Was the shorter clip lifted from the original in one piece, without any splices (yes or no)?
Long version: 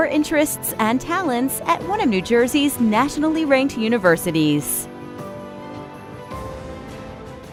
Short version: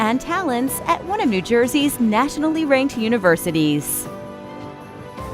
no